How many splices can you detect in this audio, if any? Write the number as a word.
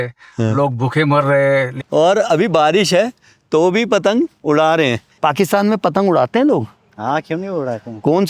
two